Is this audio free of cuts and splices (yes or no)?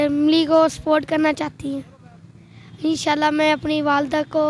yes